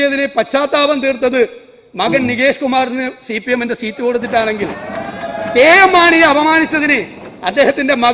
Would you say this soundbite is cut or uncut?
uncut